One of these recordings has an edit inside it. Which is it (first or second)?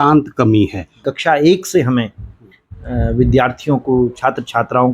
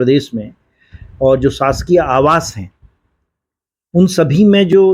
first